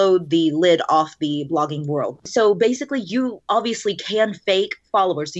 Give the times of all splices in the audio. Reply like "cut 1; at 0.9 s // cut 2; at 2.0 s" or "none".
cut 1; at 2.3 s